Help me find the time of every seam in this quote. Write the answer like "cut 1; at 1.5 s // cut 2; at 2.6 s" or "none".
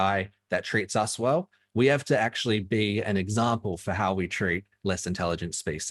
none